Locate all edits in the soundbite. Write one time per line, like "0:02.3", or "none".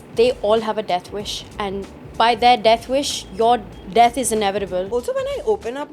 0:03.8
0:04.9